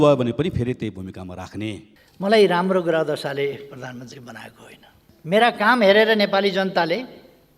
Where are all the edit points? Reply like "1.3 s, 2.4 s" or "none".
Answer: 2.0 s, 5.0 s

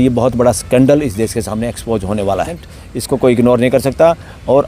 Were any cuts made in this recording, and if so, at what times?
2.6 s

